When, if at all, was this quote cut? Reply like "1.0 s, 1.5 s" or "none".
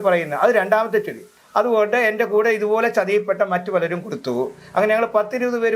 1.3 s